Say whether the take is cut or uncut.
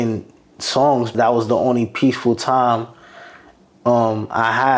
cut